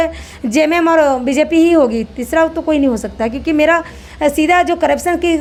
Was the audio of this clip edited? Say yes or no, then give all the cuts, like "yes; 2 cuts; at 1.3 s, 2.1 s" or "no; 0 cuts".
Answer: no; 0 cuts